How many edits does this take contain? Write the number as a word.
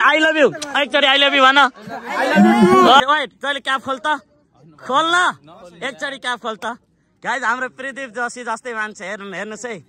one